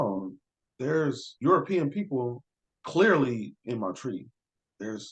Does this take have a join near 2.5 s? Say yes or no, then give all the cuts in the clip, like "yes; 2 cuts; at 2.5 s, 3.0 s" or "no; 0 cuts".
no; 1 cut; at 1.3 s